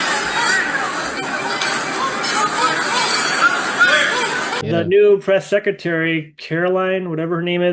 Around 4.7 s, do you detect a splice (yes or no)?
yes